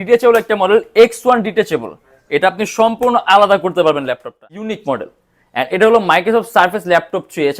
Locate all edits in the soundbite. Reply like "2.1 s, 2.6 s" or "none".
4.7 s

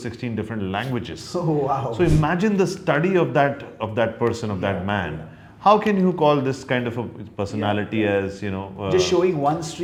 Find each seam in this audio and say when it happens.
none

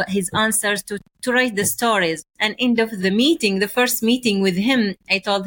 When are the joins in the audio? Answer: 3.0 s

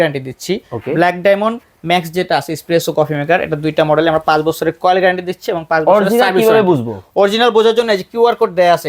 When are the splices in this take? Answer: none

